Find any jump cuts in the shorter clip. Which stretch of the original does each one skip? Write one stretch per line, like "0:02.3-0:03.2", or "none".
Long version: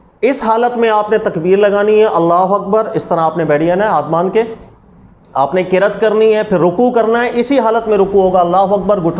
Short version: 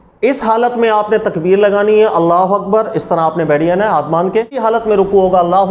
0:04.6-0:07.6